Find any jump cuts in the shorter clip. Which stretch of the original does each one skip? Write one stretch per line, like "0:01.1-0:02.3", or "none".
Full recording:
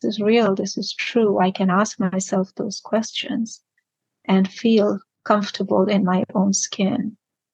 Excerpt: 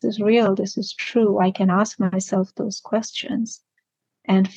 none

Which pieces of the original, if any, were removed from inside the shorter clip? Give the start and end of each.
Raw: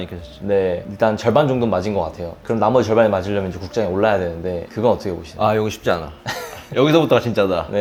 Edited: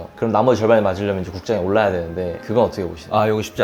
none

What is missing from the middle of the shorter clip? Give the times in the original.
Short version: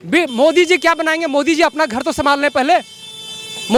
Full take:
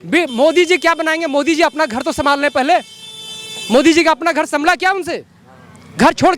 none

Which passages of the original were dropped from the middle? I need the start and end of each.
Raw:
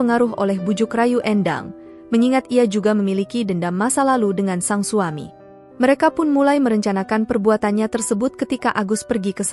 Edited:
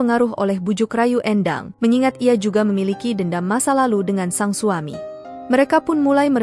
0:01.6-0:01.9

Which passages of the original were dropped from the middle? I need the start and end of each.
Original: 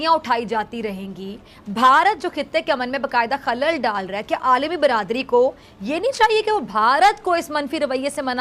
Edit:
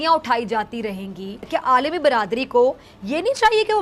0:01.4-0:04.2

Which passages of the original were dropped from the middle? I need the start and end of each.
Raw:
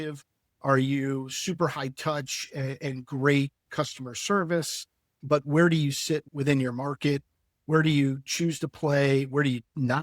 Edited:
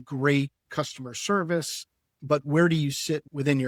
none

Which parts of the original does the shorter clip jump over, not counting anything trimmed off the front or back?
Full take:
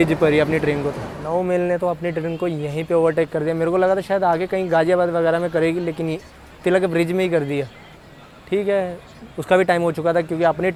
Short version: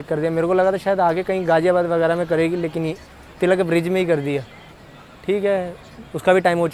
none

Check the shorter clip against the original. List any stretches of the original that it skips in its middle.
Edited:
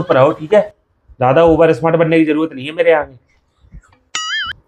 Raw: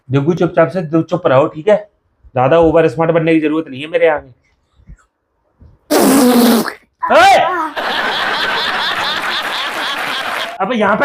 none

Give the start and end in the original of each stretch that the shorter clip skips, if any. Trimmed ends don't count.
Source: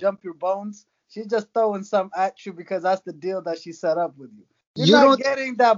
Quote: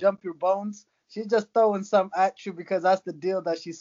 none

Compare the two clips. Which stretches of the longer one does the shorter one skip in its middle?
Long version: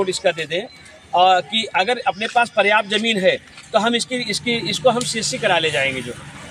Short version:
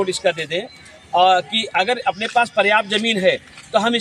none

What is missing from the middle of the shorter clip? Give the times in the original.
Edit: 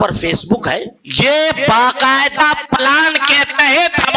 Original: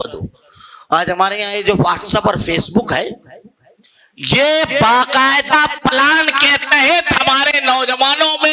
0:03.2-0:04.1

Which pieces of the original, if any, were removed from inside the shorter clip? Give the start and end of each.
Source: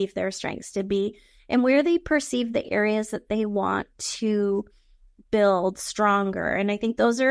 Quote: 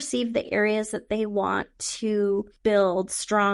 0:04.7-0:05.2

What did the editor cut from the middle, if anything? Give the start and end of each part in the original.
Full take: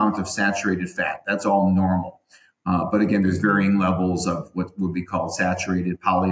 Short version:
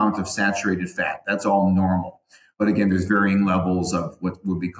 0:02.5-0:02.9

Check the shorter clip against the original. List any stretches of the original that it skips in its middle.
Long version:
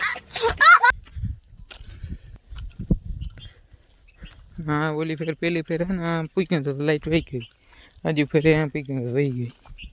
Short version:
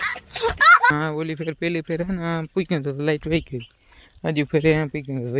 0:00.9-0:04.7

